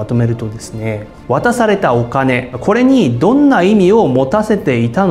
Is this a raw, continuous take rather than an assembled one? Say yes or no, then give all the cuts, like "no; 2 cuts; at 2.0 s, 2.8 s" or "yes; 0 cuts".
no; 1 cut; at 1.1 s